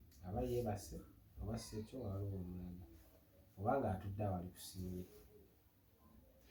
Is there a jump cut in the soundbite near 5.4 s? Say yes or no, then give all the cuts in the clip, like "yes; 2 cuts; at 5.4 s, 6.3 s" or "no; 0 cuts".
no; 0 cuts